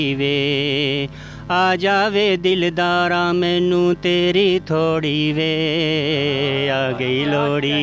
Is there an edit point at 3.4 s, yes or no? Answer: no